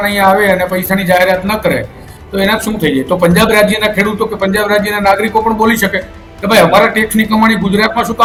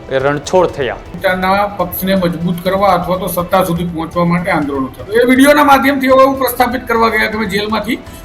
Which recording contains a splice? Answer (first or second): second